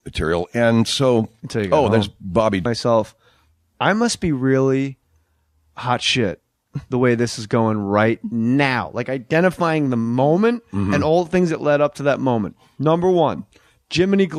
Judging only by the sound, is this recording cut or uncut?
uncut